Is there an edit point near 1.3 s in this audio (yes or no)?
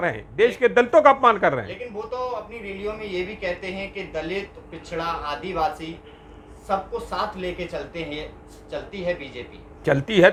no